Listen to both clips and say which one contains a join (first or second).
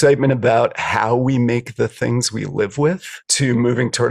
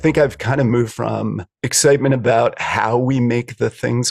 second